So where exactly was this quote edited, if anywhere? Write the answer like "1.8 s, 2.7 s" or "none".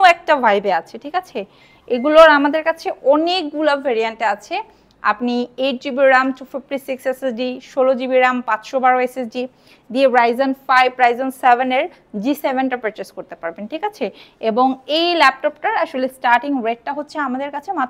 none

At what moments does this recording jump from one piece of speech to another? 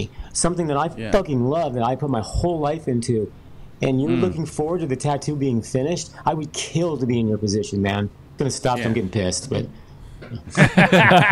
8.4 s

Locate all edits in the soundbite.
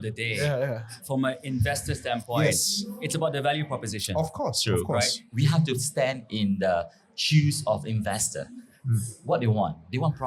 0.9 s, 5.2 s

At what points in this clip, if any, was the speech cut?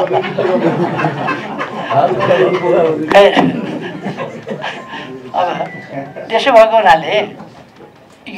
none

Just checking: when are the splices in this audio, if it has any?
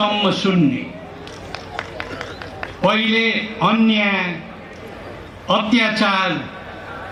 none

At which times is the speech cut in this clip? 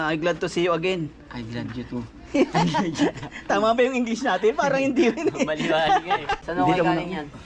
6.4 s

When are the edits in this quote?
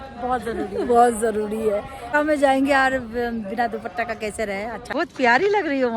2.1 s, 4.8 s

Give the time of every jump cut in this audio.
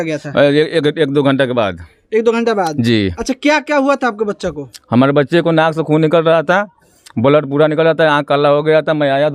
none

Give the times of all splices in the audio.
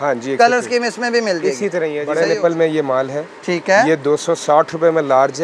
2.1 s

